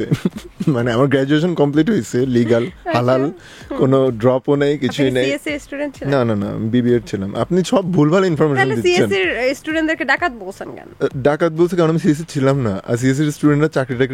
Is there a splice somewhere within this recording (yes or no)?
no